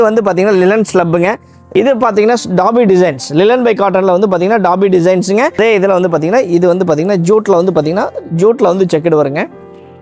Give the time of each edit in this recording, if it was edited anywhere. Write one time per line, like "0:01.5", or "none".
0:01.5
0:05.5